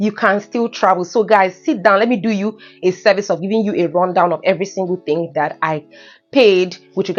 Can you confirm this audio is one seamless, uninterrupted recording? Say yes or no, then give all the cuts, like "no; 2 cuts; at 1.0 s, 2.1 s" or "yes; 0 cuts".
yes; 0 cuts